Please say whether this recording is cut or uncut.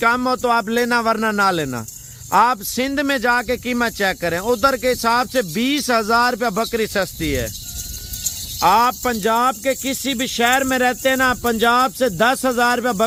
uncut